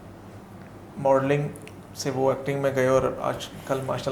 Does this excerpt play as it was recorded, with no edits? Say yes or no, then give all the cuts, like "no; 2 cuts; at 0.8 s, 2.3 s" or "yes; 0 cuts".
yes; 0 cuts